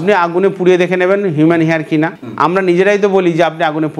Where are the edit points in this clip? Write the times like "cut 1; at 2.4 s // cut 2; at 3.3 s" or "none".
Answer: cut 1; at 2.2 s